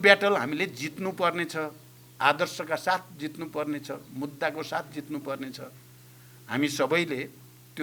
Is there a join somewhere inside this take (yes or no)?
no